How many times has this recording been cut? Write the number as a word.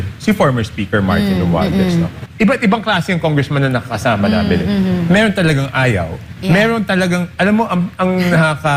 one